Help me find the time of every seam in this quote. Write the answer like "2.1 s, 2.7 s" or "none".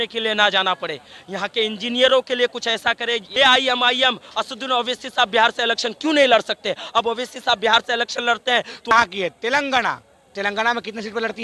3.3 s, 8.9 s